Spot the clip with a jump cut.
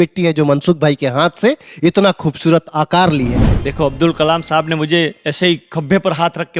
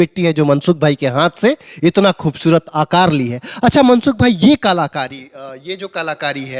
first; 1 cut; at 3.4 s

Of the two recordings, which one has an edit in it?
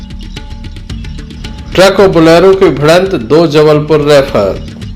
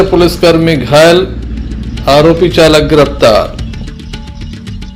first; 1 cut; at 1.3 s

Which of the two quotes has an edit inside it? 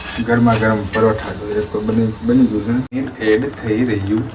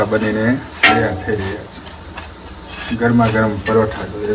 first; 1 cut; at 3.1 s

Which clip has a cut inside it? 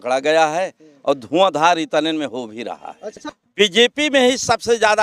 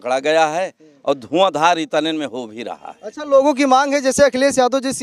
first; 1 cut; at 3.2 s

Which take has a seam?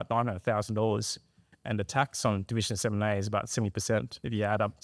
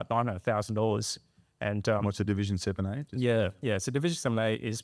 first; 1 cut; at 1.5 s

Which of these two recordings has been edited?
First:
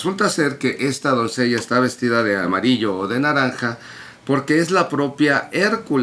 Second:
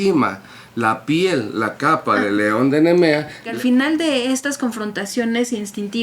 second; 1 cut; at 3.5 s

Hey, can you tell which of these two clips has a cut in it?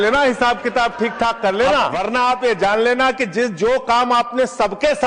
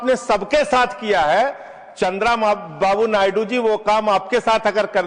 first; 1 cut; at 1.9 s

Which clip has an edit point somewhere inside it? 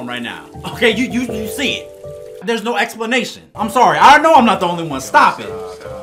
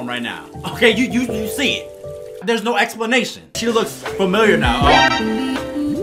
second; 1 cut; at 3.6 s

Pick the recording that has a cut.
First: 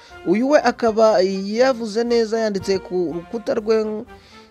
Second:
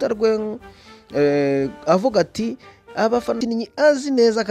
second; 1 cut; at 3.4 s

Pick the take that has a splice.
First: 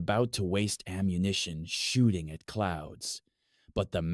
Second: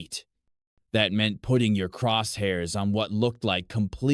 first; 1 cut; at 1.3 s

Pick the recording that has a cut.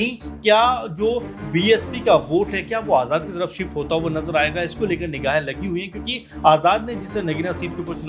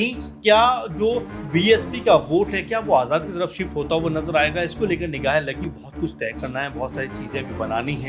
second; 1 cut; at 5.6 s

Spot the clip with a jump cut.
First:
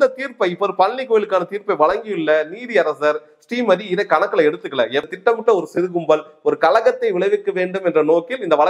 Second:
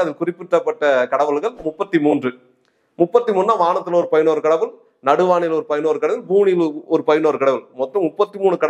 first; 1 cut; at 5.1 s

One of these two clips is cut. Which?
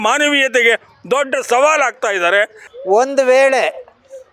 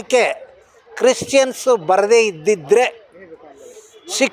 first; 1 cut; at 2.6 s

